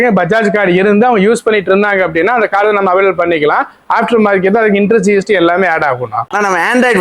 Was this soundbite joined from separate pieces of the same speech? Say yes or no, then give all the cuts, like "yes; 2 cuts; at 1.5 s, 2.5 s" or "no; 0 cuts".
no; 0 cuts